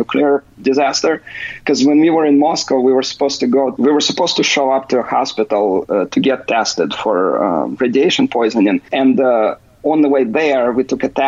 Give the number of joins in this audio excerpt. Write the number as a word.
two